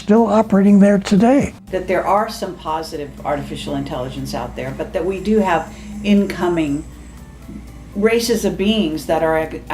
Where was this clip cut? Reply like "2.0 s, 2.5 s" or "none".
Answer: 1.6 s